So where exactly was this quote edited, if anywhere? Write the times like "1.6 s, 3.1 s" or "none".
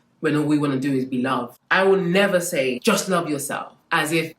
1.6 s